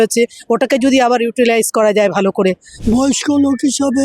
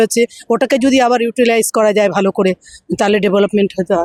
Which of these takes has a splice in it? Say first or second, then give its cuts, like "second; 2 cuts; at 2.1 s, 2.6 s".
first; 1 cut; at 2.7 s